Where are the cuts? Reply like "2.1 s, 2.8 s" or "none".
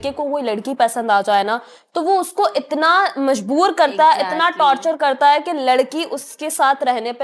none